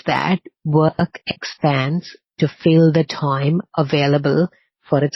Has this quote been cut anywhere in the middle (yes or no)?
no